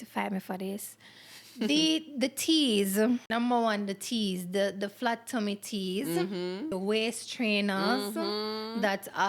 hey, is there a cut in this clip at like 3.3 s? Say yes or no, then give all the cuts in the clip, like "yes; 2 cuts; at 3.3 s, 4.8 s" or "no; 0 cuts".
yes; 2 cuts; at 3.3 s, 6.7 s